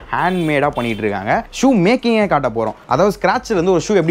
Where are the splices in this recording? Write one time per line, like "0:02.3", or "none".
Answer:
0:01.5